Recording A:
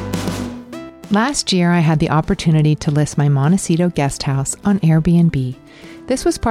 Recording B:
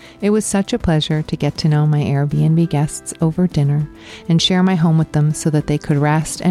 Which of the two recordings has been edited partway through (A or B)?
A